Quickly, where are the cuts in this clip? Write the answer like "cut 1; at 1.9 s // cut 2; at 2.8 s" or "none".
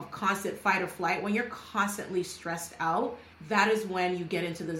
none